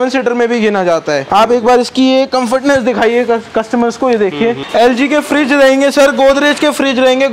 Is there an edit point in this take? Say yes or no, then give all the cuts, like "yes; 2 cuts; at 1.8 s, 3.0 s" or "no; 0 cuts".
yes; 2 cuts; at 1.2 s, 4.6 s